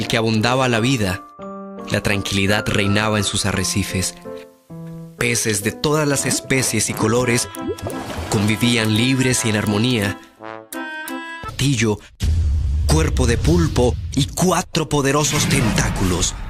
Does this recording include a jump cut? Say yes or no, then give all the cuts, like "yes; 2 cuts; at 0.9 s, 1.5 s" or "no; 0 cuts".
no; 0 cuts